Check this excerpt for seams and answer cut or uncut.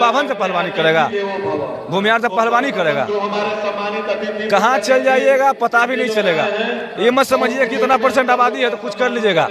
uncut